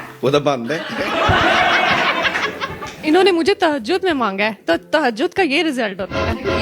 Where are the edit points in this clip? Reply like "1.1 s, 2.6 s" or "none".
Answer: none